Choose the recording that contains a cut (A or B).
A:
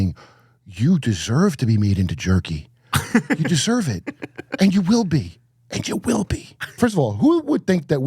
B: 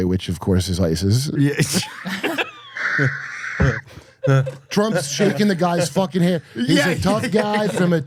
A